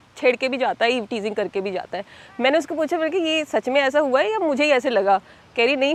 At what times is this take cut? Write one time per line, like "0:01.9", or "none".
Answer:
none